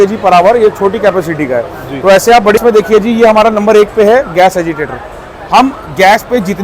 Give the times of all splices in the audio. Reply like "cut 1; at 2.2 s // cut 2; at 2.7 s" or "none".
cut 1; at 2.6 s